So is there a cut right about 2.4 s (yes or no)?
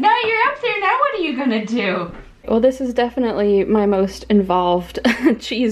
yes